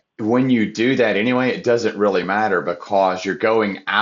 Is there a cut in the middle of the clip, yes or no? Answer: no